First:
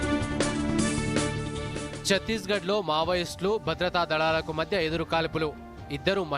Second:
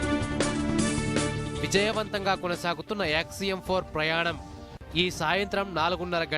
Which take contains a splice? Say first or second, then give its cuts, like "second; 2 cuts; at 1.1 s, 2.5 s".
second; 1 cut; at 1.4 s